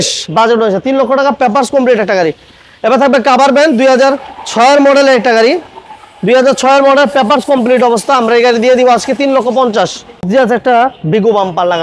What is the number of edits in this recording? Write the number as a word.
one